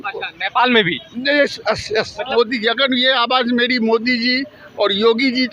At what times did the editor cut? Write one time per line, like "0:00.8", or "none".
0:02.3